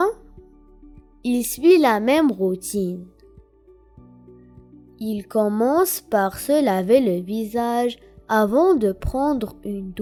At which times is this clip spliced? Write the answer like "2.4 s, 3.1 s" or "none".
none